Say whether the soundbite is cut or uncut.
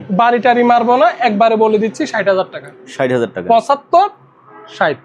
uncut